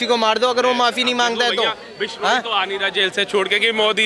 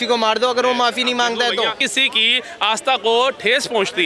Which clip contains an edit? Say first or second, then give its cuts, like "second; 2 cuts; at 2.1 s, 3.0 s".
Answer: second; 1 cut; at 1.8 s